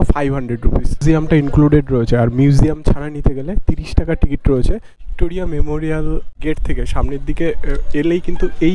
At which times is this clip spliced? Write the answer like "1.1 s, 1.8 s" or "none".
1.0 s, 4.9 s, 6.3 s